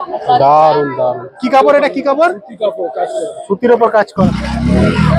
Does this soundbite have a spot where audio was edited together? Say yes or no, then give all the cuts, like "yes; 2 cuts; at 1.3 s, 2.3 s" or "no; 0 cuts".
yes; 1 cut; at 4.1 s